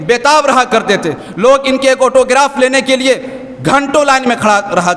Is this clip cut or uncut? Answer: uncut